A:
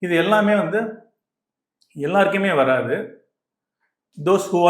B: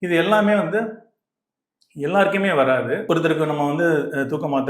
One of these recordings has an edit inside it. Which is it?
B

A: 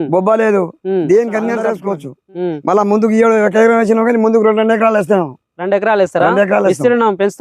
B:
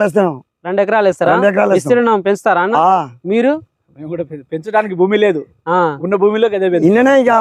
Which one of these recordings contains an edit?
A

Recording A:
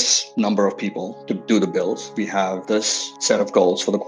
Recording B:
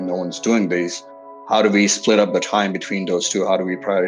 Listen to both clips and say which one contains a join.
B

